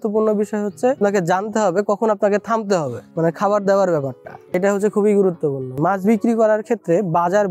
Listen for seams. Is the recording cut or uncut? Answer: cut